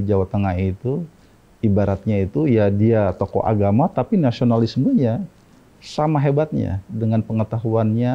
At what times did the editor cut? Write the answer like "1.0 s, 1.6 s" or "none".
none